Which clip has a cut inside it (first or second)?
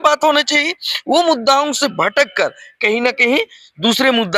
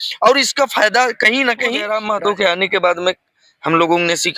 second